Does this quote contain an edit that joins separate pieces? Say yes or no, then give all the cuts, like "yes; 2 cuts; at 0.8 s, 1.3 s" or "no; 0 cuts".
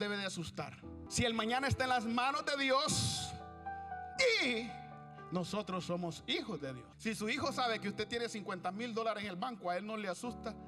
yes; 2 cuts; at 1.1 s, 6.9 s